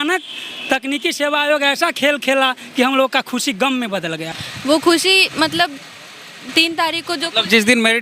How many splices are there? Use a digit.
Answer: 1